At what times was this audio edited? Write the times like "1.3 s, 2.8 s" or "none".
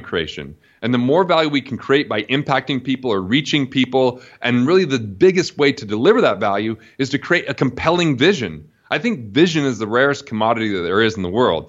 none